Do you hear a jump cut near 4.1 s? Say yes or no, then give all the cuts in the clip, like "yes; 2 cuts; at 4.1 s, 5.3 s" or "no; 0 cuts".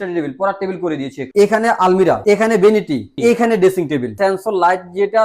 yes; 4 cuts; at 1.2 s, 2.2 s, 3.1 s, 4.1 s